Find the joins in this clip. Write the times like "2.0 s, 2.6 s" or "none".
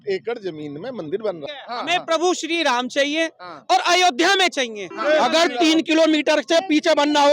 1.5 s, 4.9 s

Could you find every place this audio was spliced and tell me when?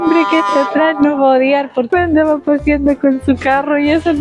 1.9 s

